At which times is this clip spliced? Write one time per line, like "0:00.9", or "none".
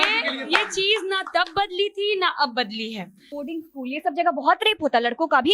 0:03.4